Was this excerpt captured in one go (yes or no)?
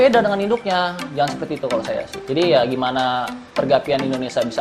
no